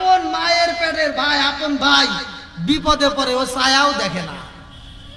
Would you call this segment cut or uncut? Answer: uncut